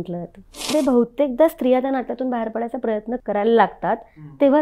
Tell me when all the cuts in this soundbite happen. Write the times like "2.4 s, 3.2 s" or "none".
0.7 s, 3.2 s

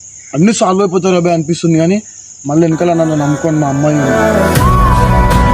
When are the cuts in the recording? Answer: 2.2 s, 4.5 s

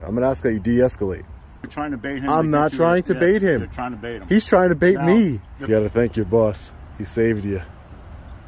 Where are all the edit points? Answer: 1.7 s, 5.5 s

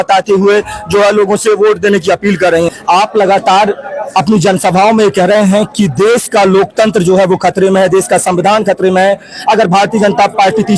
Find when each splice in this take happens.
2.7 s

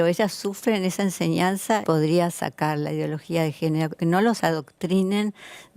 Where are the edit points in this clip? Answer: 1.8 s, 4.0 s

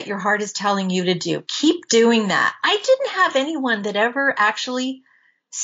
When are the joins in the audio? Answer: none

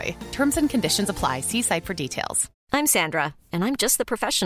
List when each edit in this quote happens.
2.5 s

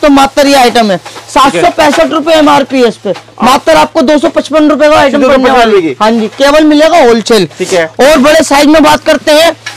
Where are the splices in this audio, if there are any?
none

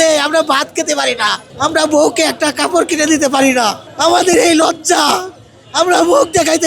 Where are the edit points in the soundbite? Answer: 1.4 s, 3.8 s

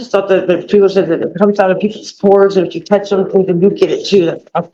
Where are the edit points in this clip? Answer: none

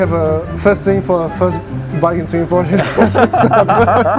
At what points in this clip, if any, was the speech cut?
none

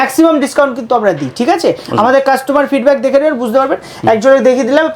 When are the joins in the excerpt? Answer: none

